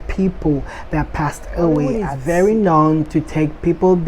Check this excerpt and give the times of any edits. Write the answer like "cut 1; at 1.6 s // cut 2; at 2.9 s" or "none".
cut 1; at 2.1 s